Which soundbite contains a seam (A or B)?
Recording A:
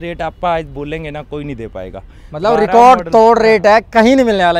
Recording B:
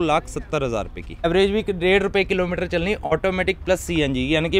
B